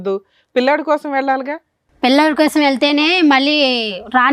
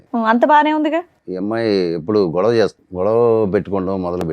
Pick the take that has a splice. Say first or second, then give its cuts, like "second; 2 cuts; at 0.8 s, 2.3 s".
second; 2 cuts; at 1.2 s, 2.8 s